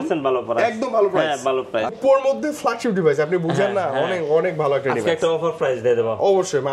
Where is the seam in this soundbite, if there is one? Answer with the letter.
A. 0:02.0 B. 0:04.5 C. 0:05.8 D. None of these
A